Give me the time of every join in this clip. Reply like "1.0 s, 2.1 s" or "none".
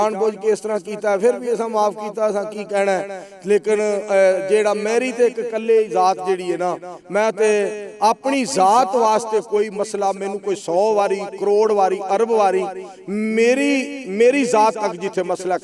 none